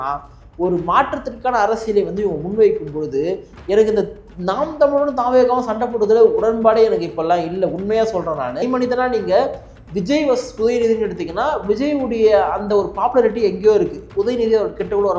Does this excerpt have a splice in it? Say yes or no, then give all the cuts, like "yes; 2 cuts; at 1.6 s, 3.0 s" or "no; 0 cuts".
yes; 1 cut; at 8.6 s